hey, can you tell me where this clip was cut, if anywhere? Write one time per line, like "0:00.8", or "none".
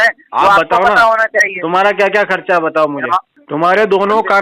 0:03.4